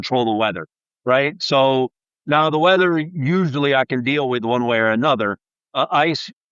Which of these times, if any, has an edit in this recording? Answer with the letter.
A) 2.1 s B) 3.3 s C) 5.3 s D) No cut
D